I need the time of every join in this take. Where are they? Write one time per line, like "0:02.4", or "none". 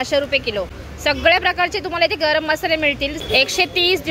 0:03.2